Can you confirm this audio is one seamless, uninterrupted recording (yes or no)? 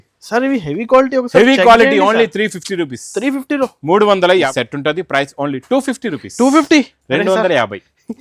no